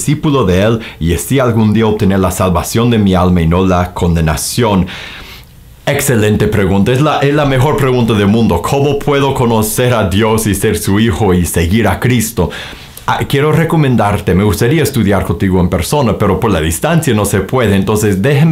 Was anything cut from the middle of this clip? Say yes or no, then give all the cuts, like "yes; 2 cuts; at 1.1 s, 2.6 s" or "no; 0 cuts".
no; 0 cuts